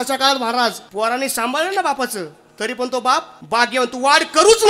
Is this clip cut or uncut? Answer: cut